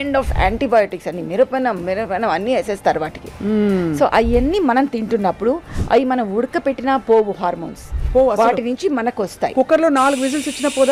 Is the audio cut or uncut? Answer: uncut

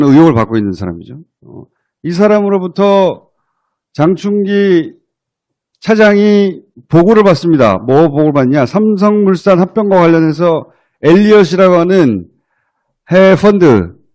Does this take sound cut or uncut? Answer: cut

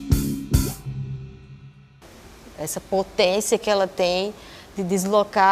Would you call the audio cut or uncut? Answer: cut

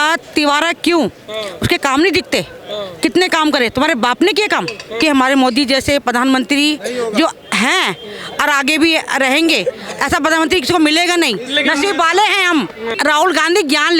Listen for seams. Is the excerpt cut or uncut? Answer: cut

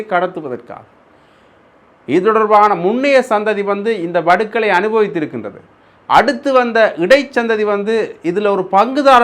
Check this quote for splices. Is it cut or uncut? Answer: uncut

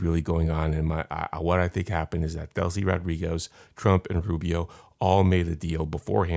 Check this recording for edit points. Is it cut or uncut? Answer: uncut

